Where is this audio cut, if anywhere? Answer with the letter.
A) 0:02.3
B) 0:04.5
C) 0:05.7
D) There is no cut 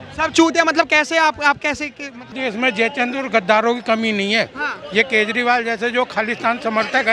A